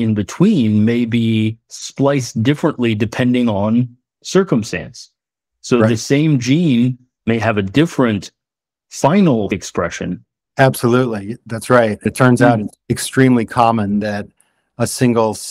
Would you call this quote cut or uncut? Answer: cut